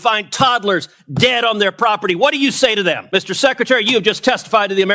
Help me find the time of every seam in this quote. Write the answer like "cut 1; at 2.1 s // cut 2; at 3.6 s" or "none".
cut 1; at 3.0 s